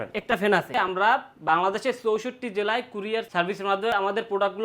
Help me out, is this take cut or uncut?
cut